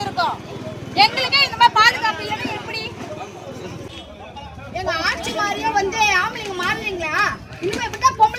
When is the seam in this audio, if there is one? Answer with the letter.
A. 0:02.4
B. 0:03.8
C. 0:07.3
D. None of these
B